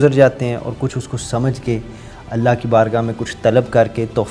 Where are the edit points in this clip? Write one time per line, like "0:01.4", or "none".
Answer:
none